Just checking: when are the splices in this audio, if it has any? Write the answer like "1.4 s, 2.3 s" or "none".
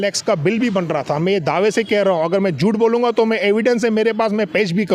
none